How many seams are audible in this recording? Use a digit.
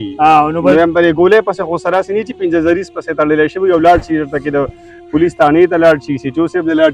0